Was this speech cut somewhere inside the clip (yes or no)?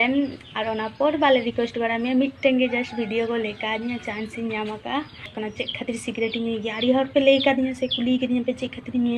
yes